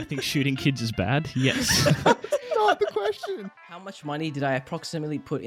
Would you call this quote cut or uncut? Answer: cut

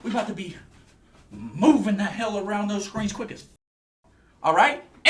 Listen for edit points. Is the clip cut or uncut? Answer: uncut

